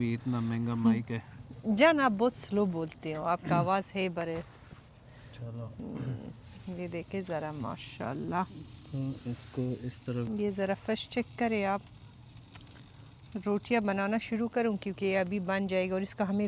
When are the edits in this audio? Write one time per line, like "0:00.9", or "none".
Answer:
none